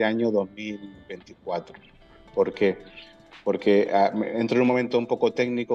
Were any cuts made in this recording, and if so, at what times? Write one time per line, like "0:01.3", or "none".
none